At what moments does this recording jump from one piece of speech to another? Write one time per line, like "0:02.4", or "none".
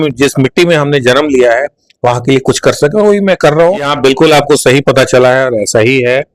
0:03.9